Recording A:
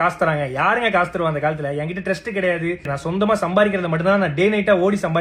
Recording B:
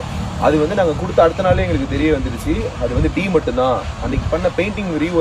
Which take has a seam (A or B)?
A